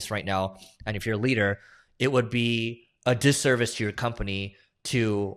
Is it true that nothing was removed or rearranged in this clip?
yes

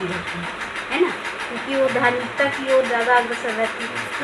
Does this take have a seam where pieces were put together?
no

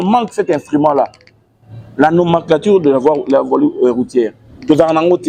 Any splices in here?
no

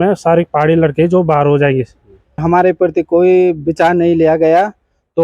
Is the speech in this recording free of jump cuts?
no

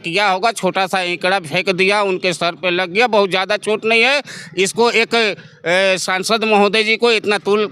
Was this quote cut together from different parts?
no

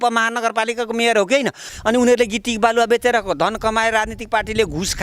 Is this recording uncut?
no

